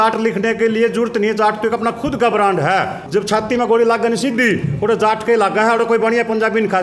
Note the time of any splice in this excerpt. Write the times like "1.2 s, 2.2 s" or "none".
3.0 s